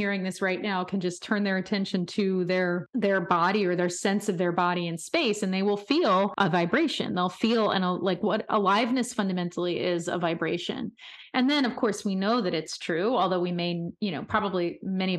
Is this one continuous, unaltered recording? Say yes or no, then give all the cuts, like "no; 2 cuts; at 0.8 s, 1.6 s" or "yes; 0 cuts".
no; 2 cuts; at 2.8 s, 6.3 s